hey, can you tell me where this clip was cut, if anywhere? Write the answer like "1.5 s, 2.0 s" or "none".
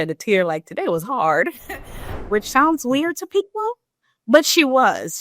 2.1 s